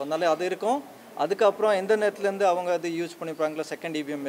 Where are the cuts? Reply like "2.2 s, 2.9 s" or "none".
none